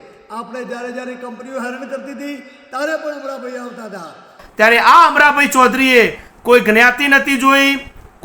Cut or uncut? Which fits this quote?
cut